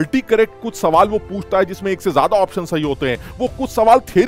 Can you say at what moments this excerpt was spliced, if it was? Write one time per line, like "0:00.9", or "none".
none